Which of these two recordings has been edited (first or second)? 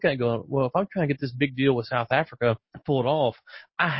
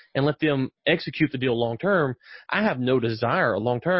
first